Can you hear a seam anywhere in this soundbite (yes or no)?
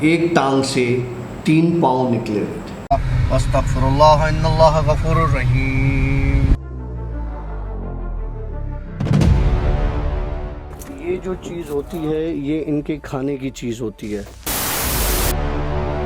yes